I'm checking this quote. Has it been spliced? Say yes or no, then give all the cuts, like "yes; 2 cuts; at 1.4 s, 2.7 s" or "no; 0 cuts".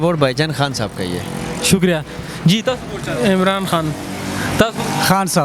no; 0 cuts